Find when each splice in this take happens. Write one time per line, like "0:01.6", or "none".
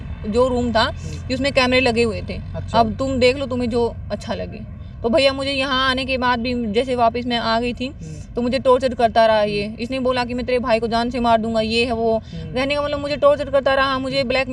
none